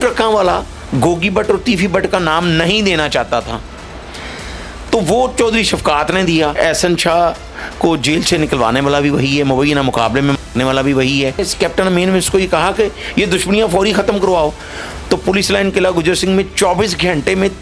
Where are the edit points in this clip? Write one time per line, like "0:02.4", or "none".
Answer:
0:06.5
0:11.5